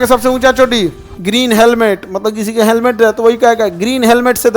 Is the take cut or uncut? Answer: cut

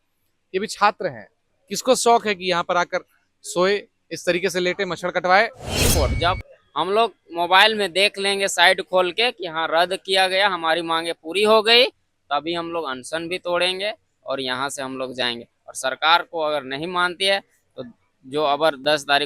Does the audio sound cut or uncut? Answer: cut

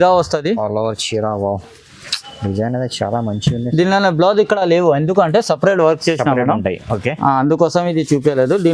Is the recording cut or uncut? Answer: uncut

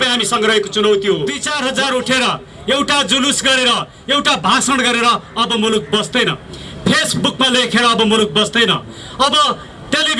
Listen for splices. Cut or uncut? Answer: cut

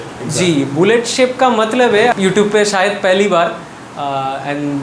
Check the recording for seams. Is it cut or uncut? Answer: cut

